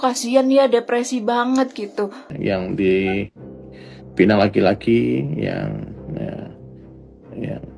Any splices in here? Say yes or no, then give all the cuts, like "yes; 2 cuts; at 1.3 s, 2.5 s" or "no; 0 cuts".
yes; 1 cut; at 2.2 s